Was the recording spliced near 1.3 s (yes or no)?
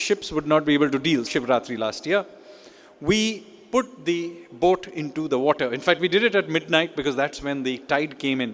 yes